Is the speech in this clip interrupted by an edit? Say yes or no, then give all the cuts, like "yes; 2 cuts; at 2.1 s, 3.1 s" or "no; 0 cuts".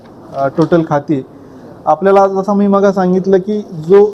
no; 0 cuts